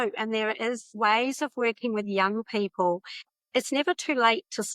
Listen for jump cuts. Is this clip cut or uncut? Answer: cut